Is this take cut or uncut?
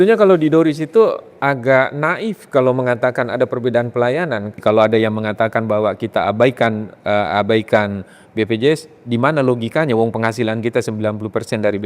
cut